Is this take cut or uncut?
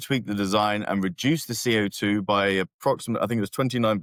uncut